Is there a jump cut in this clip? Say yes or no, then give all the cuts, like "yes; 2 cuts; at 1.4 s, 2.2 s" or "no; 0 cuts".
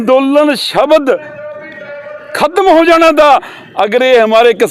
no; 0 cuts